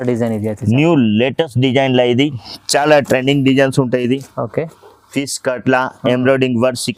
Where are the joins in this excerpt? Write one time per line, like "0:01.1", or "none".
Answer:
none